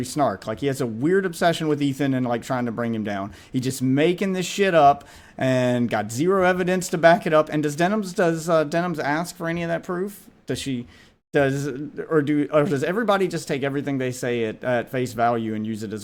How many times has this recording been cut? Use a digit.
0